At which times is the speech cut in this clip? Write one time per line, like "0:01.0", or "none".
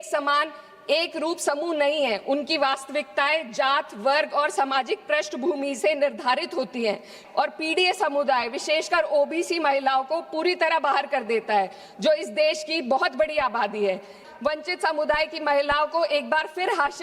0:07.2
0:14.3